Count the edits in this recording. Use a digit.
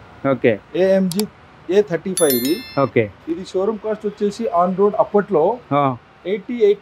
0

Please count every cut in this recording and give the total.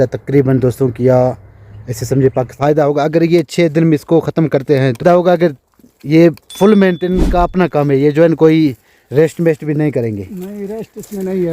2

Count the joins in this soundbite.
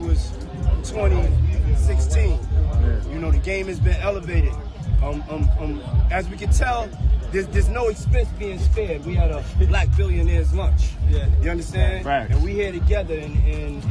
0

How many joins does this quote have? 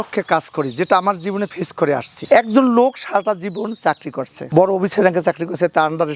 1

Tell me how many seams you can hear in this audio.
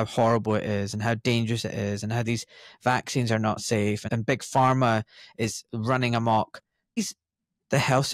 2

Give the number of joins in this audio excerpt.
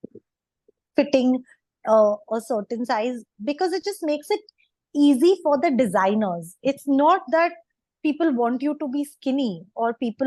0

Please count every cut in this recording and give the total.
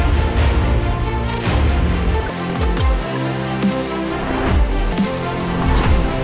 0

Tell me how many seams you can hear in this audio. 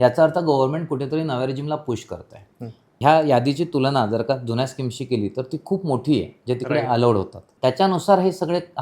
2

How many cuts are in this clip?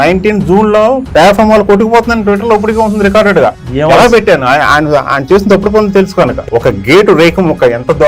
1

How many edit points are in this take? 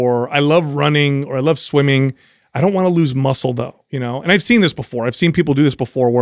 0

